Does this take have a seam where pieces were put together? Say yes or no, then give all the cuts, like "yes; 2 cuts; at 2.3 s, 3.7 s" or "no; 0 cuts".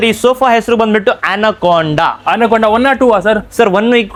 no; 0 cuts